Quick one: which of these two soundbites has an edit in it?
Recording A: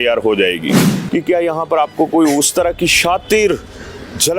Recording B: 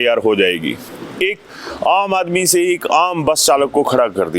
A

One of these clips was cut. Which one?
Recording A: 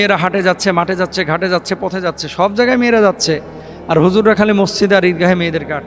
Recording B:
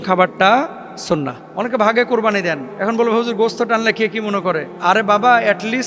B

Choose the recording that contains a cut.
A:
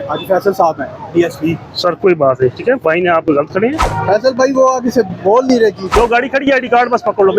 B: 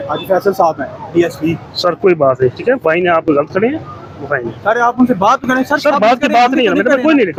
A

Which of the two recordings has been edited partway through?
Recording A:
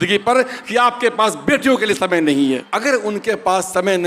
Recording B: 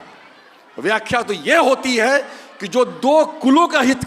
A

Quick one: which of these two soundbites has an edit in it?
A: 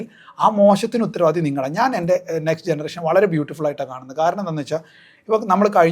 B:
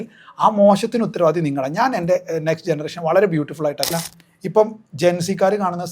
B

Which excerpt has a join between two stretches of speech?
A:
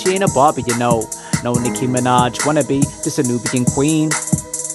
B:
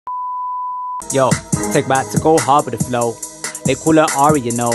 B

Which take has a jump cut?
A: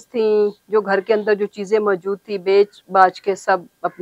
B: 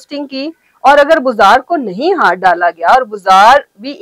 A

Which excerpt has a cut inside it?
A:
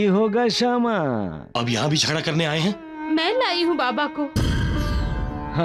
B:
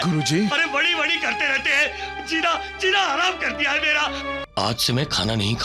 B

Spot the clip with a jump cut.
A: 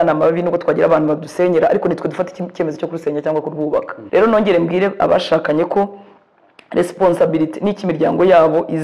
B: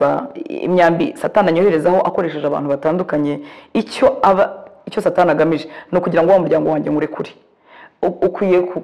A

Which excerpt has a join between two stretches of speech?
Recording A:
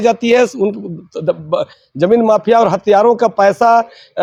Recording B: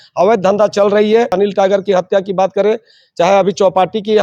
B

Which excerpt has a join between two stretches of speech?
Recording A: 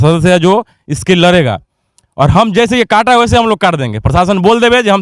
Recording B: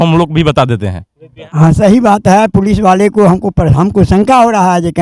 B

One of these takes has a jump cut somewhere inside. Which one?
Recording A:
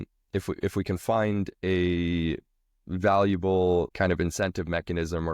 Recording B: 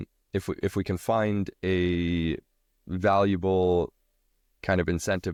A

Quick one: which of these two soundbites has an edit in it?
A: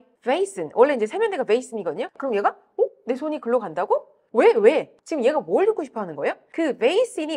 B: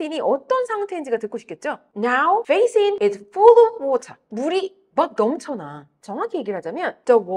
A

